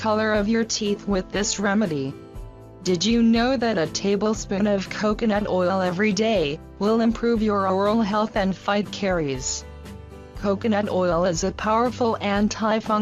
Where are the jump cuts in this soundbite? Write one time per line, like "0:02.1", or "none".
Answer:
0:08.2